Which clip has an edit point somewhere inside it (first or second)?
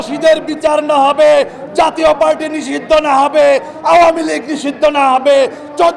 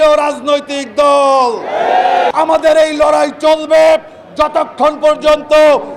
second